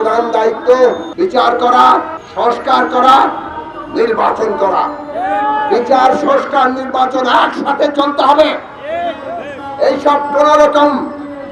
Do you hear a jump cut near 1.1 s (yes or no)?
yes